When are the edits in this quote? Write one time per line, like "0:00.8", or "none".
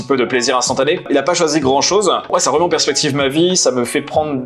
0:01.0
0:02.3